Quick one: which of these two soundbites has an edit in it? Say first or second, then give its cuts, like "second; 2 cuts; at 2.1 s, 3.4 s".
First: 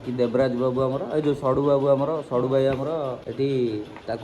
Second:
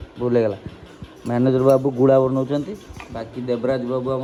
first; 1 cut; at 3.2 s